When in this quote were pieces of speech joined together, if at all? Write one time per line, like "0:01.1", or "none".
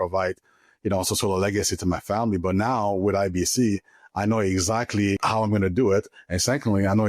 0:05.2